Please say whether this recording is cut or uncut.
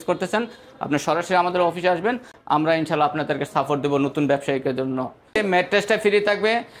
cut